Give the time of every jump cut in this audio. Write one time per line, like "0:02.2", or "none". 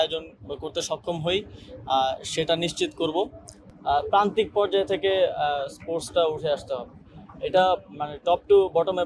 0:03.6